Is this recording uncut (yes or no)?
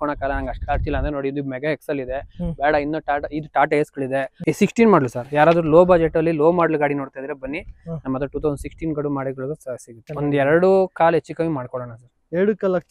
no